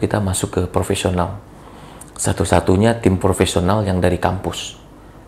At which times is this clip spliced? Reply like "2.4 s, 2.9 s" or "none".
none